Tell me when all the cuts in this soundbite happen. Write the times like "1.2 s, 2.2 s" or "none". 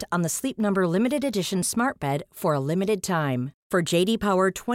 none